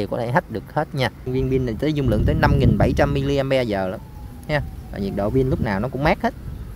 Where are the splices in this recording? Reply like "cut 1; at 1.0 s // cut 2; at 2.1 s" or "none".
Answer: cut 1; at 1.2 s